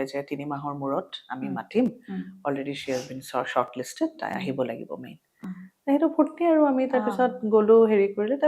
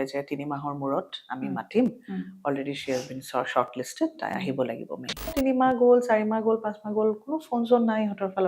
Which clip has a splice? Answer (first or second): second